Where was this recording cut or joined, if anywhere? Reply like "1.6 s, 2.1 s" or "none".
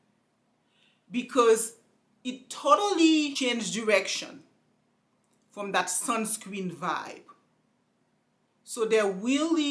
3.3 s